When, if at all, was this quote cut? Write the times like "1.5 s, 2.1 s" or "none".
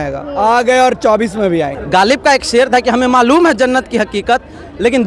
1.8 s